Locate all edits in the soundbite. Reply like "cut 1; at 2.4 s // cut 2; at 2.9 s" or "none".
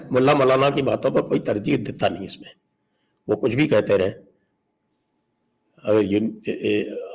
none